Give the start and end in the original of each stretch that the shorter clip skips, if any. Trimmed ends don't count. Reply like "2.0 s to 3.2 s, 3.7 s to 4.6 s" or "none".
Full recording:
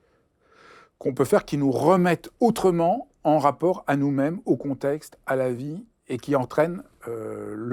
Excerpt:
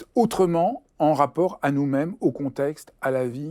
none